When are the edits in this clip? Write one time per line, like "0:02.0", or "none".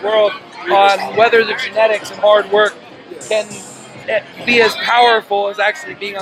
none